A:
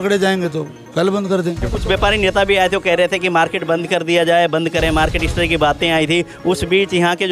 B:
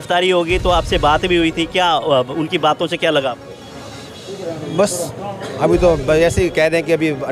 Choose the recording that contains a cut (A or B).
A